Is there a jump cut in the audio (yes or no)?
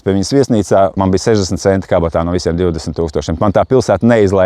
yes